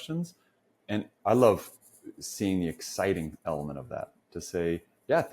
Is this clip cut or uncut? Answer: cut